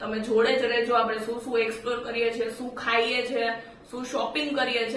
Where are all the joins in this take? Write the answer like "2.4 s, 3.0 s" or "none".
none